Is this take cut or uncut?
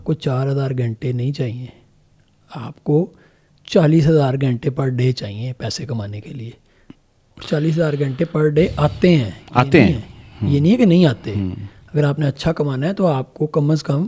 uncut